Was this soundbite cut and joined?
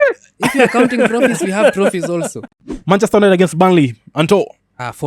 yes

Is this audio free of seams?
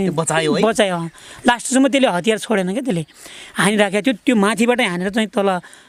yes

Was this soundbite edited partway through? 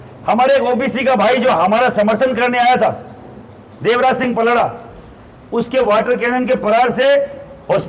no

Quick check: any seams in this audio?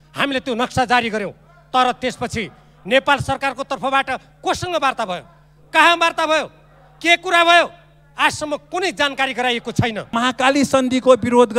yes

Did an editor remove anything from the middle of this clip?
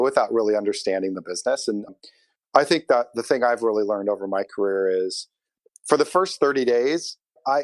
no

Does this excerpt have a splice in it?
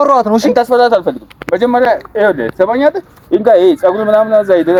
no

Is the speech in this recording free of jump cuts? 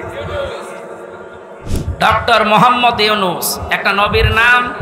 no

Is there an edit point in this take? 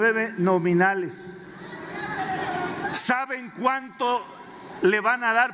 no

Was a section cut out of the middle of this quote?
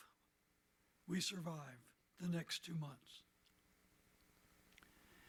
no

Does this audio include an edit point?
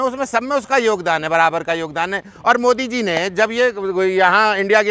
no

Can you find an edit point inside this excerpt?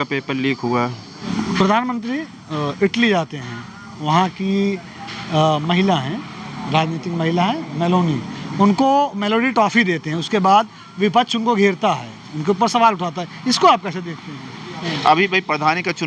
yes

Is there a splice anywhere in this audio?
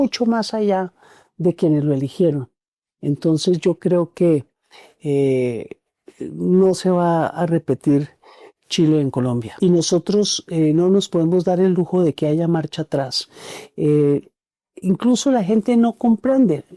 yes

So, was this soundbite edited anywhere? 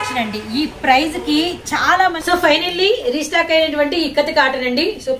yes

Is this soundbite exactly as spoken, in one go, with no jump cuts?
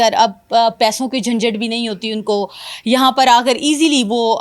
yes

